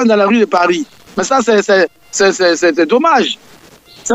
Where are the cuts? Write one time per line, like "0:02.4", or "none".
none